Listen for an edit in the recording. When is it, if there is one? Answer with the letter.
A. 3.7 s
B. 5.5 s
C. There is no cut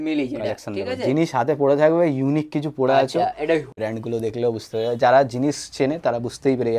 A